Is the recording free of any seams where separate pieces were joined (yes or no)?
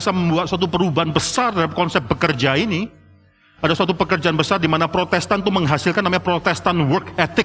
yes